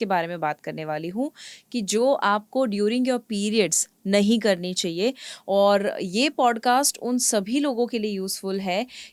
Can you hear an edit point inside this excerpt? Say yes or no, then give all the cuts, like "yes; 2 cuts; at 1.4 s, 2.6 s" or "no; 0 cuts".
no; 0 cuts